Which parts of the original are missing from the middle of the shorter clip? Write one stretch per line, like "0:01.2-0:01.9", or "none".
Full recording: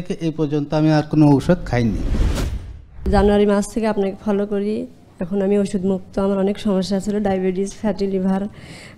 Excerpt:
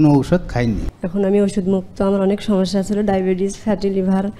0:02.1-0:05.1